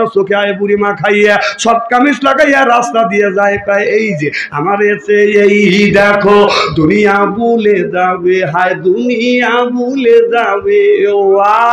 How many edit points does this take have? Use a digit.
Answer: 0